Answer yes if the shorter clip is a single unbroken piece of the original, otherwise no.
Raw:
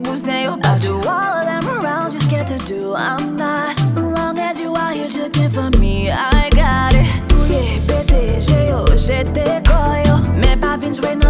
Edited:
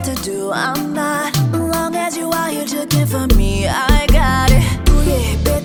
yes